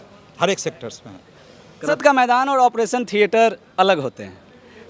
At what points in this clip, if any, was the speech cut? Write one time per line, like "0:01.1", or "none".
0:01.9

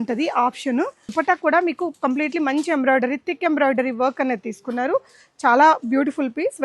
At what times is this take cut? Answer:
0:01.1

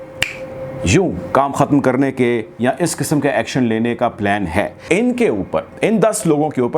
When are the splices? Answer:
0:04.8

